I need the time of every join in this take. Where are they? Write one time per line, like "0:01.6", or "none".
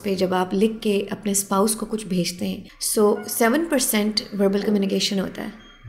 0:02.7